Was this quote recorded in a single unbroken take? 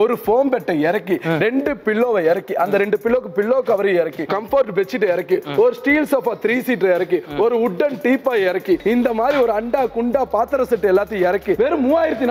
no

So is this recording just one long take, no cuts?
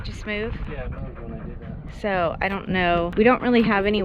no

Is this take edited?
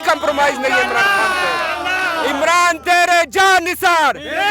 yes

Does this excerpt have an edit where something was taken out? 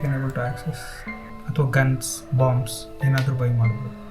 yes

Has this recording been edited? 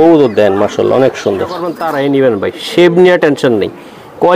yes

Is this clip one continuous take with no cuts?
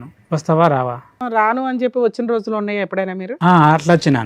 no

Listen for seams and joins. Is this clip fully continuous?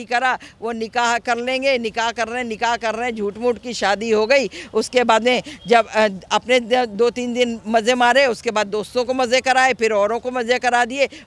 yes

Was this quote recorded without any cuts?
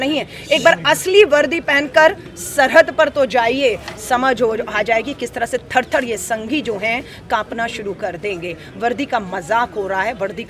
yes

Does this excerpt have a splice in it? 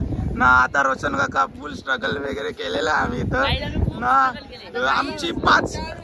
no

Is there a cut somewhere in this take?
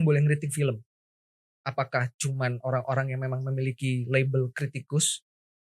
no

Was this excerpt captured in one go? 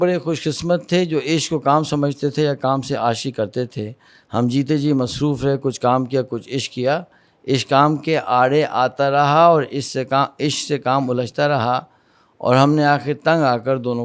yes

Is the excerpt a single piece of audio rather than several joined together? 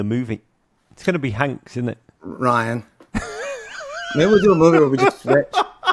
no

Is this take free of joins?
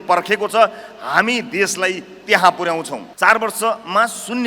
no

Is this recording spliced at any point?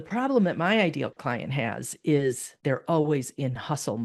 yes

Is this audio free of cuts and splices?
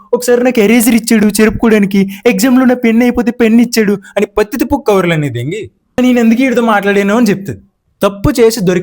no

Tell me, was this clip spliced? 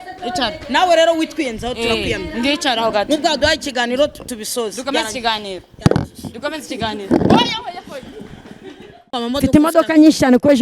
yes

